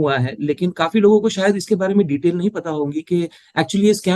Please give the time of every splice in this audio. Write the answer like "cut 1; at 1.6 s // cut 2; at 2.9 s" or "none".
none